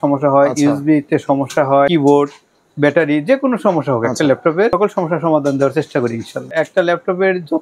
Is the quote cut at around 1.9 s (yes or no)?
yes